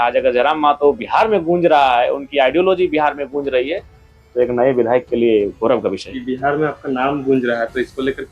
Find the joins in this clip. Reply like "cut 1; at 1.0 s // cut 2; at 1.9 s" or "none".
cut 1; at 6.2 s